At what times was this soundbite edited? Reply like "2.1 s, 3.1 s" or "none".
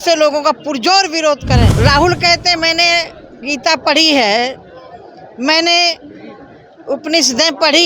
1.7 s